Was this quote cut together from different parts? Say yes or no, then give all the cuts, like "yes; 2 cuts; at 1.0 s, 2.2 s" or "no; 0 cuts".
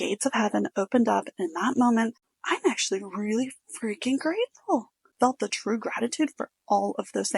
yes; 2 cuts; at 2.2 s, 5.1 s